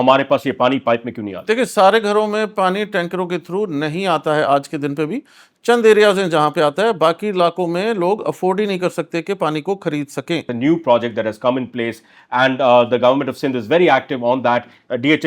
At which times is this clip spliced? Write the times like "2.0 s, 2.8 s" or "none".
10.5 s

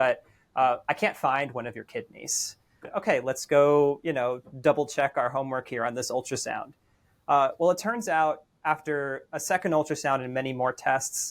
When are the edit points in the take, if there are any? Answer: 2.9 s

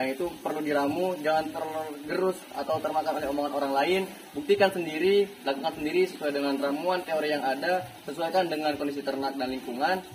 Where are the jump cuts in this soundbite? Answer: none

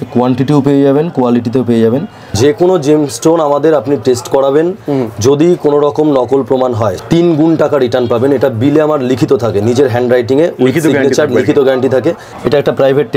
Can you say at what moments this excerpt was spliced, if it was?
2.3 s, 7.0 s, 12.3 s

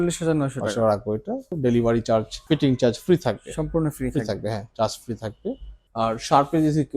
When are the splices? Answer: 1.5 s, 2.3 s, 5.8 s

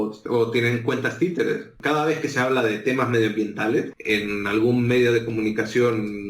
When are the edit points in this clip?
4.0 s

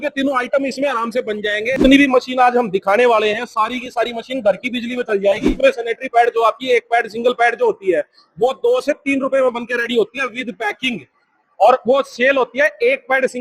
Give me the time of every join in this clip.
1.7 s, 5.5 s

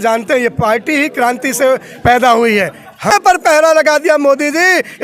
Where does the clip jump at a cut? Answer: 3.1 s

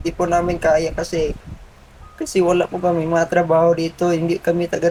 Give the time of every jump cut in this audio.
none

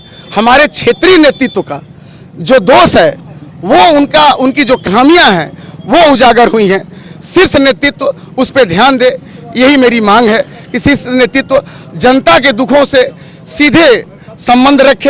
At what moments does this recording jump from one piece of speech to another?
none

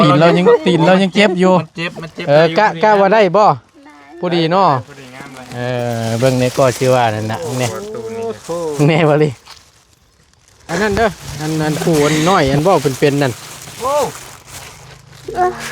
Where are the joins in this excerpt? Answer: 10.6 s

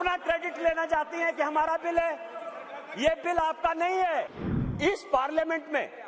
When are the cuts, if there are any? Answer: 4.4 s

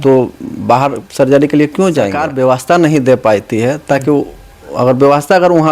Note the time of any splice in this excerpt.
2.2 s

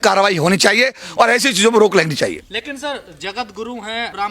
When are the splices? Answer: none

